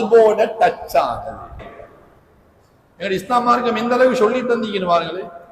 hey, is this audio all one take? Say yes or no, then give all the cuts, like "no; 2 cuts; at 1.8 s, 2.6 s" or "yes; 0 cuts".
no; 1 cut; at 1.6 s